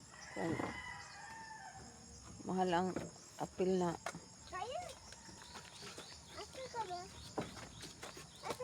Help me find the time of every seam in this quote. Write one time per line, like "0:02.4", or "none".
none